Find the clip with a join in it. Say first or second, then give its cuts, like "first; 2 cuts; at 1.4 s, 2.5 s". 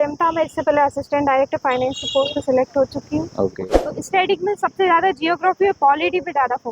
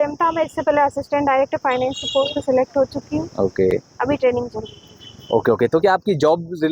first; 1 cut; at 3.5 s